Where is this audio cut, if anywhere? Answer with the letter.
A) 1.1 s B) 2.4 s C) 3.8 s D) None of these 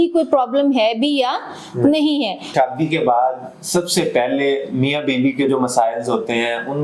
B